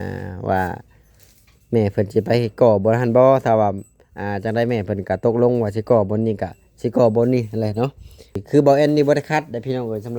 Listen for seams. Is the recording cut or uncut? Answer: cut